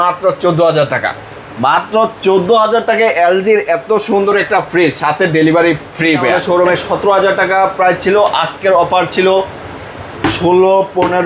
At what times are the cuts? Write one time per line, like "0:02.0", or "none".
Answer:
0:06.3